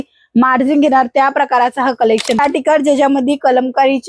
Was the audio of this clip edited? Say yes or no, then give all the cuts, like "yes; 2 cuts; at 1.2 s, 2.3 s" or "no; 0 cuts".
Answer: yes; 1 cut; at 2.4 s